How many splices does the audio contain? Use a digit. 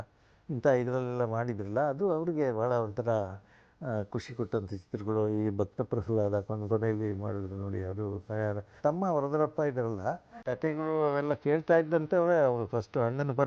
2